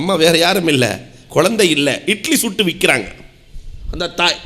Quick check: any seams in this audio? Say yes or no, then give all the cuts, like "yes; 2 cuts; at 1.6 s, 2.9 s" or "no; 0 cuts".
no; 0 cuts